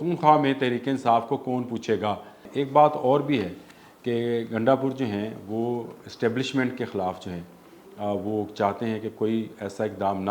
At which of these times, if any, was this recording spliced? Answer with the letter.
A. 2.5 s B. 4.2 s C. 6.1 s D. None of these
A